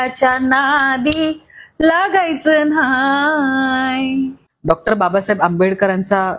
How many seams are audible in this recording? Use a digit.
1